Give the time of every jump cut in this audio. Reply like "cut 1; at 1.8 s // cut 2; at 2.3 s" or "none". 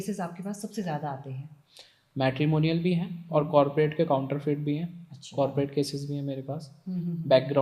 none